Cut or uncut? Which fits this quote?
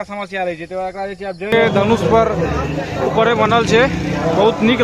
cut